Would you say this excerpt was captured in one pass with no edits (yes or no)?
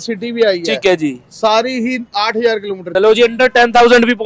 no